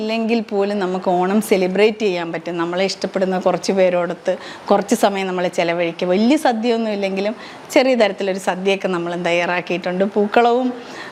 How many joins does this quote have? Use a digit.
0